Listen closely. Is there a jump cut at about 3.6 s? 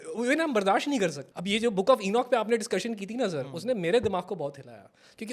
no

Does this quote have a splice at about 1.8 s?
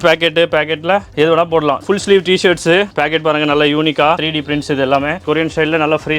yes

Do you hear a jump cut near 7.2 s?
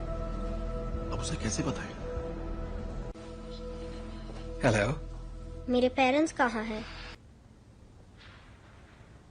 yes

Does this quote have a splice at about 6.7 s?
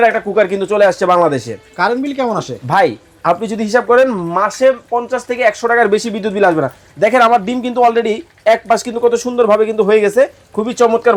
no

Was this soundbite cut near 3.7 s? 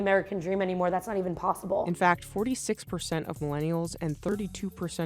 no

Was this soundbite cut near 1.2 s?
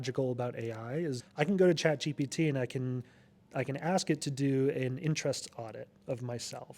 yes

